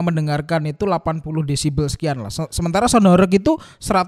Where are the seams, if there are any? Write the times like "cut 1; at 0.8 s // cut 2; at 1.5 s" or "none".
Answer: none